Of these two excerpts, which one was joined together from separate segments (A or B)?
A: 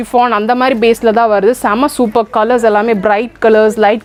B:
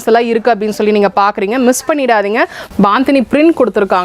B